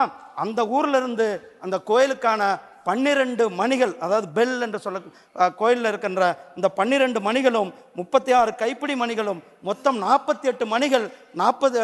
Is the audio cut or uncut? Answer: uncut